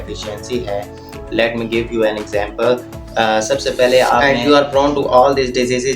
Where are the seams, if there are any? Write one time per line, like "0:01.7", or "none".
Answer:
0:04.2